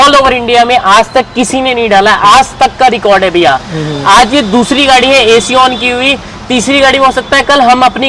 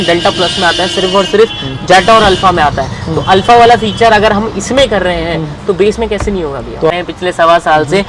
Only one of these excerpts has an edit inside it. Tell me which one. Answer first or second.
second